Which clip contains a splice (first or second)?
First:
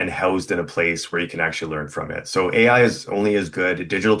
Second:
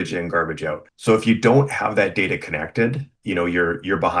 second